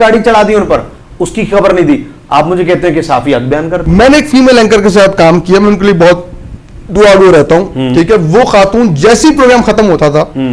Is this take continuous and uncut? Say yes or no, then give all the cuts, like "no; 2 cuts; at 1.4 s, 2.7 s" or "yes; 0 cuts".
no; 1 cut; at 3.8 s